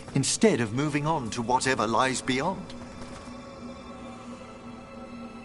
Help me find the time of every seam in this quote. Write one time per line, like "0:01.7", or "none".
0:02.6